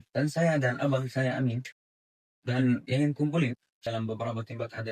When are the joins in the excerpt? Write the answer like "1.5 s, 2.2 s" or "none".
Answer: 3.8 s